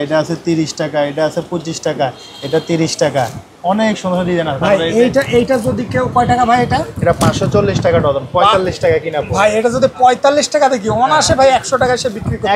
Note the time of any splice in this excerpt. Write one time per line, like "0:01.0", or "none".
none